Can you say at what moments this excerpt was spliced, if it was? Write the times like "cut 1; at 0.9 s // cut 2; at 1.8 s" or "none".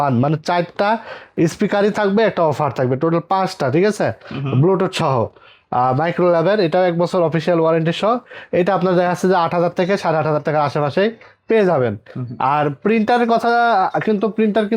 none